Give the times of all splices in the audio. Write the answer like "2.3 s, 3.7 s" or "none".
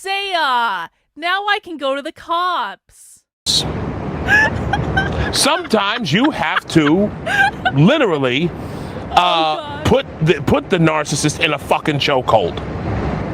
3.5 s